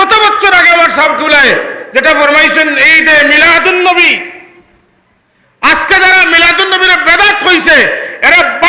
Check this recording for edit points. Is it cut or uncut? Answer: uncut